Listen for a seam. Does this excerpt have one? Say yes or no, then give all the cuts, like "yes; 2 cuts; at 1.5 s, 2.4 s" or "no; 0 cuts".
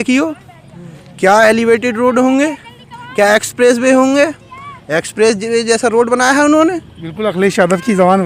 no; 0 cuts